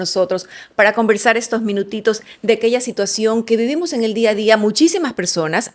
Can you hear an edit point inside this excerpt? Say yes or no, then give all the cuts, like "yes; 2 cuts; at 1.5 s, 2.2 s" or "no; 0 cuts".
no; 0 cuts